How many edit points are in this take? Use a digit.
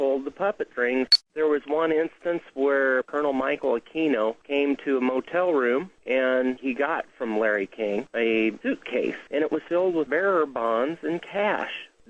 1